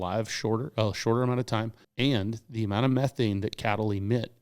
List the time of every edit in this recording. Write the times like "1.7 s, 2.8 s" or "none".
1.8 s